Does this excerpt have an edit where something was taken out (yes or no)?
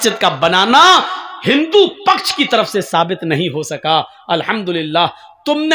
no